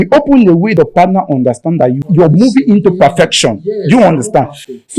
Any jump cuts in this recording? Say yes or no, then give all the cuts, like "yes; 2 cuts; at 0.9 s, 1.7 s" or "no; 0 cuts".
yes; 2 cuts; at 0.7 s, 2.0 s